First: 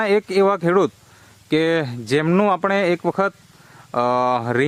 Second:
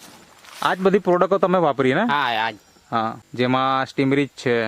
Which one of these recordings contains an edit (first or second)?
second